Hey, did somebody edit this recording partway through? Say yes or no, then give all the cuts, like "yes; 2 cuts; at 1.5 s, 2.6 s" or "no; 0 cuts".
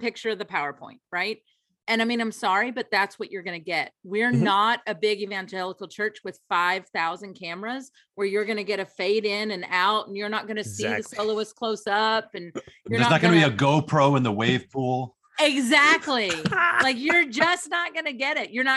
no; 0 cuts